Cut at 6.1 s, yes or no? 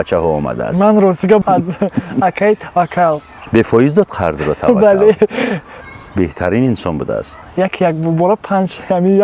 no